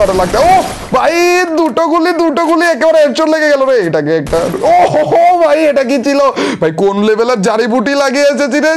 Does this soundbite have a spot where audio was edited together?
no; 0 cuts

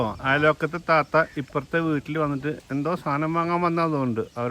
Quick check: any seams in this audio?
yes; 1 cut; at 2.6 s

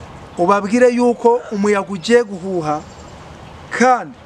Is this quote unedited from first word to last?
yes; 0 cuts

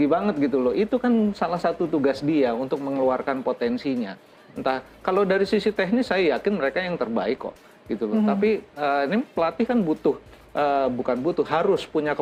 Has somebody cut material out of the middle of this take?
no; 0 cuts

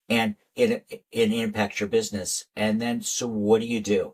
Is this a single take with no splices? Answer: yes; 0 cuts

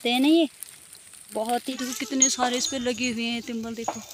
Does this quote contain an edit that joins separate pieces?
yes; 1 cut; at 1.7 s

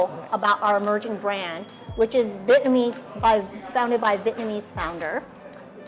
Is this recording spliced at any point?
no; 0 cuts

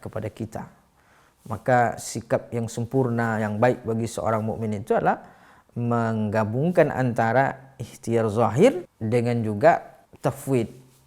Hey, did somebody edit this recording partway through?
yes; 2 cuts; at 8.9 s, 10.0 s

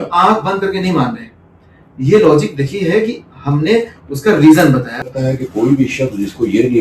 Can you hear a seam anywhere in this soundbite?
yes; 1 cut; at 5.1 s

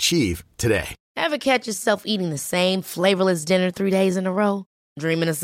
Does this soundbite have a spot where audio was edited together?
yes; 1 cut; at 1.0 s

